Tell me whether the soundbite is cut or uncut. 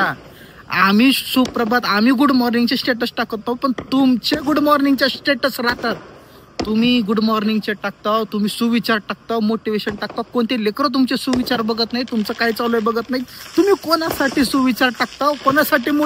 uncut